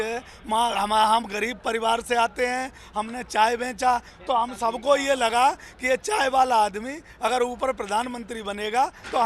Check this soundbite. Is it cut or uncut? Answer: uncut